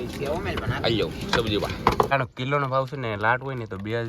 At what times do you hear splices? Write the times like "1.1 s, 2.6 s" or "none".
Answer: 2.1 s